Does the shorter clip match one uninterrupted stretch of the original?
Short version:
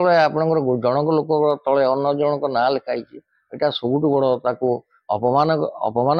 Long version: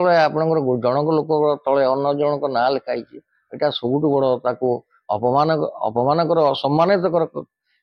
yes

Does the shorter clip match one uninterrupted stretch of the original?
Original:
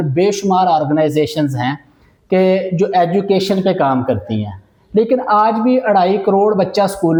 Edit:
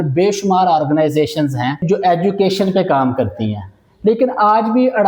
no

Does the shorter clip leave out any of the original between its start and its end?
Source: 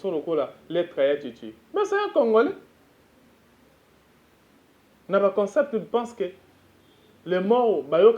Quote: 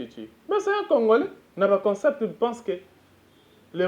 yes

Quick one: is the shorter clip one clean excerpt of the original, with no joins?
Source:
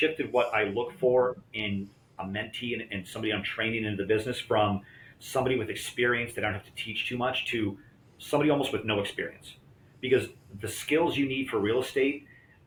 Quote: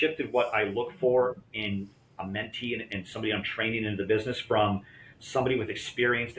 yes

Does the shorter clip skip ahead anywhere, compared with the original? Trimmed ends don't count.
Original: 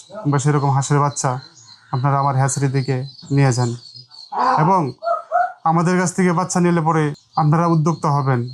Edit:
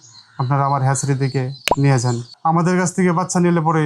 yes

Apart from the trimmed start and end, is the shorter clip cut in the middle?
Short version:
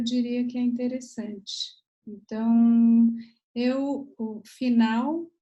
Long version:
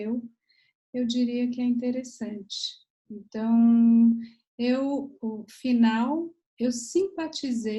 no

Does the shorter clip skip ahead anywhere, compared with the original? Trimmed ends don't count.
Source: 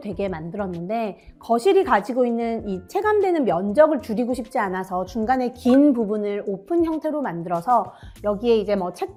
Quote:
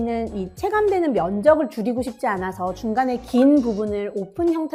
no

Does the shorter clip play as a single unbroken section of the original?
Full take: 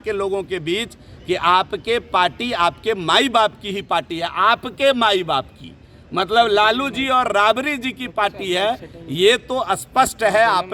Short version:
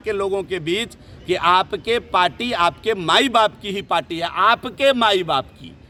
yes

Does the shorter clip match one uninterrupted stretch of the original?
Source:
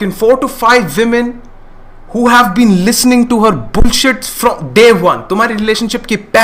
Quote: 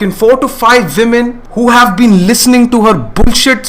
no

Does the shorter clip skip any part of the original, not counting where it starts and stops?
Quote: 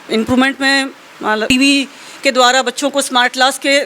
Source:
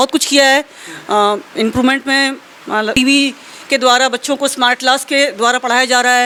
no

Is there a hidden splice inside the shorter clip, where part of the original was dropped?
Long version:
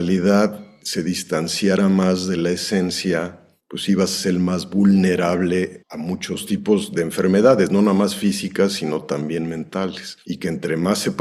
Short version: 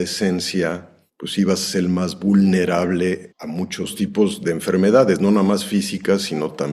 no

